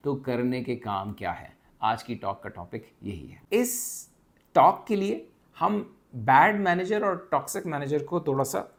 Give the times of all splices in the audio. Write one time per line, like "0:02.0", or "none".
none